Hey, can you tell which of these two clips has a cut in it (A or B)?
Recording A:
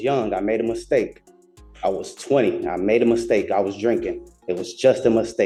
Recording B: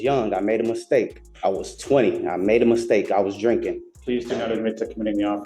B